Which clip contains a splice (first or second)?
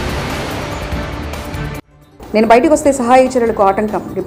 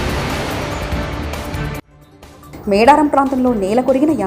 second